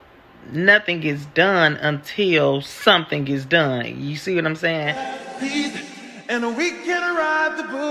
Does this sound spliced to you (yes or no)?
yes